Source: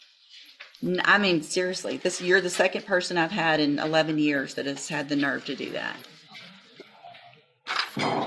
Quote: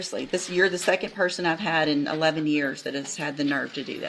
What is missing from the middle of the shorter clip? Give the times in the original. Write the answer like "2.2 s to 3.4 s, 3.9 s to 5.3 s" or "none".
none

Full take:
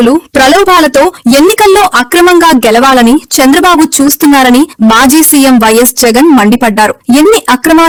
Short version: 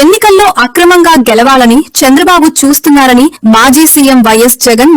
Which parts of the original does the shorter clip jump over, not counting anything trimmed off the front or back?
none

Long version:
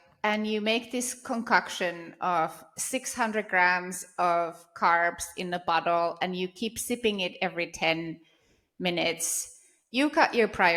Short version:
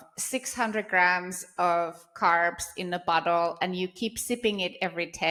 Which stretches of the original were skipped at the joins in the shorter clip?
none

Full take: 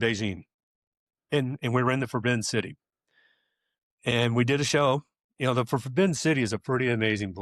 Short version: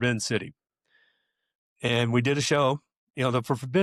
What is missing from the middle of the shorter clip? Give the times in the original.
none

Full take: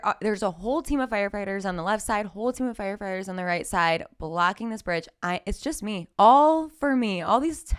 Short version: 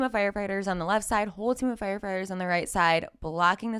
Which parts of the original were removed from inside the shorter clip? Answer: none

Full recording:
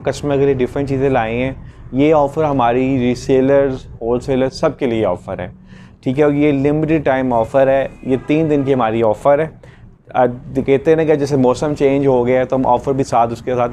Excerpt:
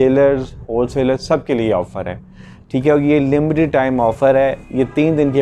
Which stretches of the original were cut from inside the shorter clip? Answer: none

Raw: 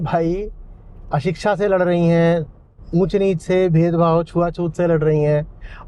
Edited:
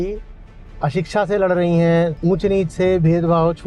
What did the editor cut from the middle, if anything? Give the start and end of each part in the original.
2.5 s to 2.9 s

